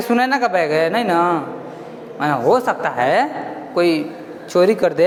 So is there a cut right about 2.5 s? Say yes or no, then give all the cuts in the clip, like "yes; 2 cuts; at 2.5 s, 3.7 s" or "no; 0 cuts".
no; 0 cuts